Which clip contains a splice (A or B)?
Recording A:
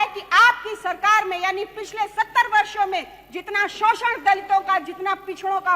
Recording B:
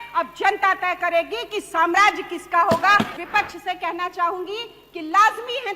B